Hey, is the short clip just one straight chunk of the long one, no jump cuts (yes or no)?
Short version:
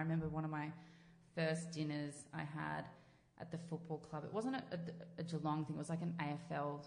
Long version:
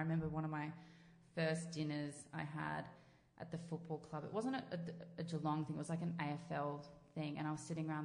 yes